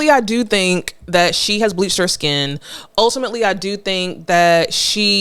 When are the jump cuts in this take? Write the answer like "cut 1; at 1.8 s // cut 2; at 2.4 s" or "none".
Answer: none